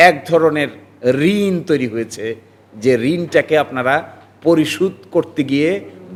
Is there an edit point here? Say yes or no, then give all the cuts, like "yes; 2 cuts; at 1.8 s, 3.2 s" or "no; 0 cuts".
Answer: no; 0 cuts